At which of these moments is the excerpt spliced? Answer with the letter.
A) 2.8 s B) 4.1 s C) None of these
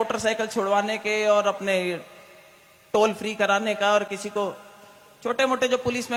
C